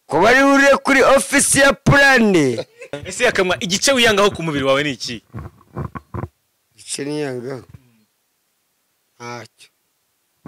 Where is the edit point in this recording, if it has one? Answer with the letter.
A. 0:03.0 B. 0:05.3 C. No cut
A